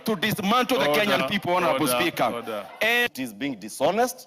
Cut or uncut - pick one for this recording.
cut